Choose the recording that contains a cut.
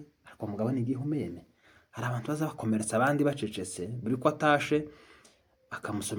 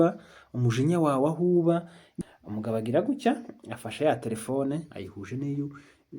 second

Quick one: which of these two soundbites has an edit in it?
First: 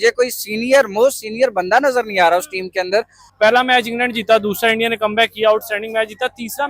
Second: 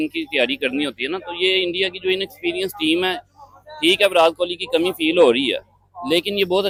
first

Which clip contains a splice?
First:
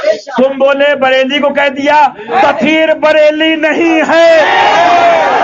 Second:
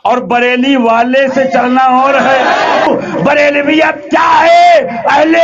second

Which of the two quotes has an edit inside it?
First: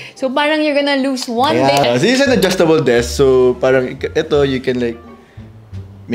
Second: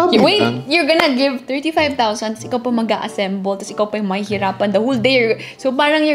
first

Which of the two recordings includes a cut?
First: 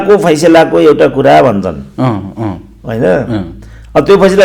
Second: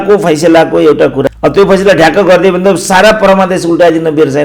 second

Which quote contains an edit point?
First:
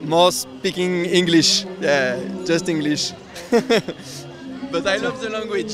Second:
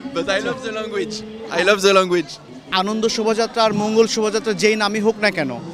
second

